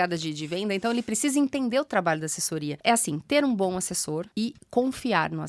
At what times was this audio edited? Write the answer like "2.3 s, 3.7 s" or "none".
2.7 s, 4.5 s